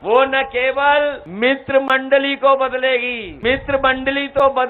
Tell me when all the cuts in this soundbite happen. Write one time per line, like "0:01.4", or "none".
0:01.2
0:03.2

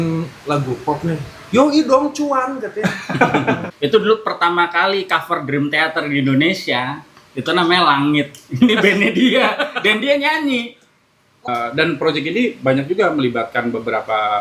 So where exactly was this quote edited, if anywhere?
0:03.7
0:11.5

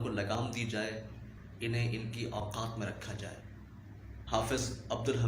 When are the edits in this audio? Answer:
0:03.9

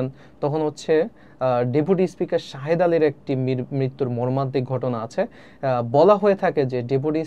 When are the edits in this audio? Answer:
none

